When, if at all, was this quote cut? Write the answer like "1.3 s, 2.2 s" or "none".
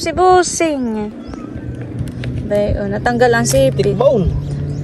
1.2 s